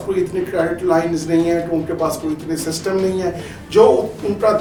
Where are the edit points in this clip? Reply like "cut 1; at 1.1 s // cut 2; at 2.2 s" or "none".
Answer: none